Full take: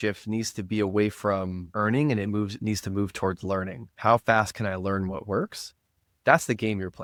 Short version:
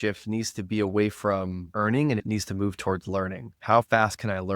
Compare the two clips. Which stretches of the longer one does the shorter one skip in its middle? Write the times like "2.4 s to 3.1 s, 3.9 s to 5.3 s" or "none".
2.2 s to 2.6 s